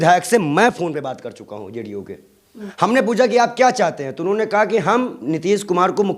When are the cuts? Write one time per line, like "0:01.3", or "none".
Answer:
0:02.6